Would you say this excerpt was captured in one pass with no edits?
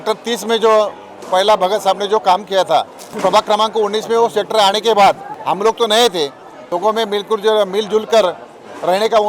no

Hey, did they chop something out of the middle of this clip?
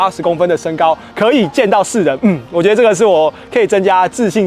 no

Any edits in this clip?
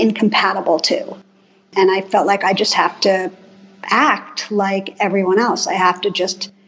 yes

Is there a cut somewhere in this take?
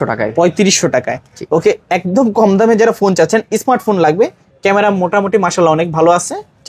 no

